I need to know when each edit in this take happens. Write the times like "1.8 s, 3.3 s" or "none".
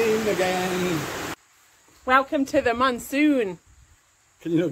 1.3 s